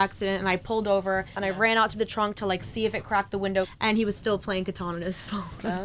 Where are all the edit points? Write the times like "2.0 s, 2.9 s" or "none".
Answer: 1.4 s, 3.7 s